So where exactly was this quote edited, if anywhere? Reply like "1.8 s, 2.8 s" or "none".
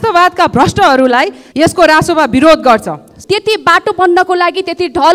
1.4 s, 3.1 s